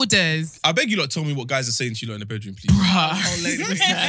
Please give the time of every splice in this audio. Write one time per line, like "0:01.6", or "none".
none